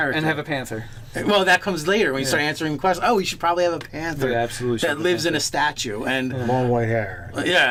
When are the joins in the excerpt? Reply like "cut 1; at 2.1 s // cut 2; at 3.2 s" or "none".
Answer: none